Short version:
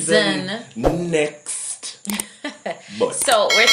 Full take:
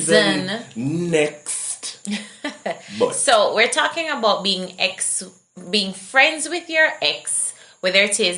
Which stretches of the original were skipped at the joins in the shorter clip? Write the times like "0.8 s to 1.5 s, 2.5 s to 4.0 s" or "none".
none